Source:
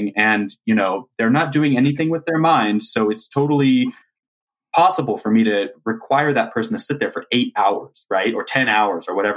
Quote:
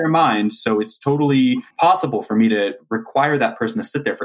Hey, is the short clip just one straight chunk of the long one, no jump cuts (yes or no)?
no